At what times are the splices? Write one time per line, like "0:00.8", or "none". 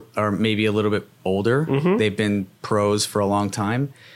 0:01.7
0:02.5